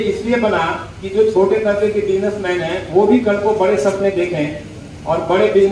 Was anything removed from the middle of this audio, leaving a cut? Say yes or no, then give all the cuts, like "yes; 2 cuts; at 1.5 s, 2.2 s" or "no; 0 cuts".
no; 0 cuts